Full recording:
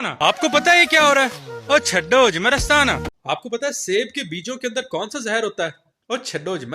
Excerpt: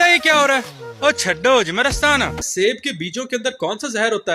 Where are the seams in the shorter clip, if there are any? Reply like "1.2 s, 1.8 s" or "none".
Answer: 2.5 s